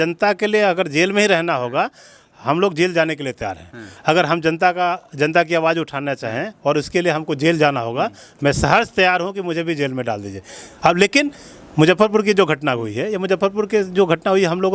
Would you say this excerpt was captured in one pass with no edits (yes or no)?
yes